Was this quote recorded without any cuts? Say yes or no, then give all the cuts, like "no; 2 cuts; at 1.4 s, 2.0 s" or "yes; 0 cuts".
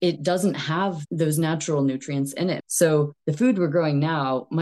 no; 2 cuts; at 1.0 s, 2.6 s